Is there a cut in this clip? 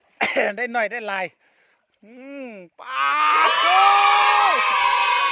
yes; 1 cut; at 4.3 s

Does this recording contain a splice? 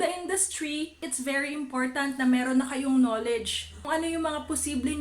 yes; 2 cuts; at 1.0 s, 3.8 s

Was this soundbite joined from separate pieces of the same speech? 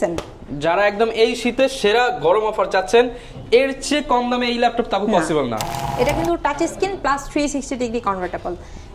yes; 1 cut; at 5.8 s

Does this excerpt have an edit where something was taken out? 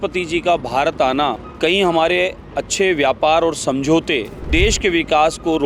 yes; 2 cuts; at 1.5 s, 4.4 s

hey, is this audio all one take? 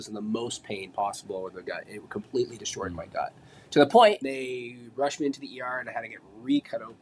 no; 1 cut; at 4.2 s

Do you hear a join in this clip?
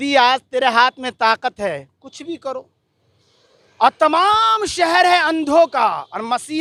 no; 0 cuts

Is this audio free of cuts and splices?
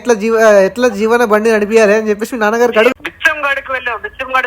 no; 1 cut; at 2.9 s

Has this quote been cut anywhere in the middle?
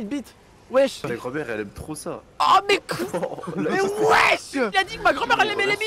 yes; 2 cuts; at 1.0 s, 4.7 s

